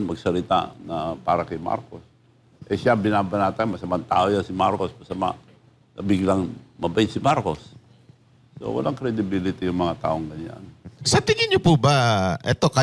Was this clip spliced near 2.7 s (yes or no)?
no